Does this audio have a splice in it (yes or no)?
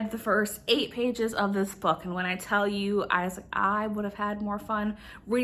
no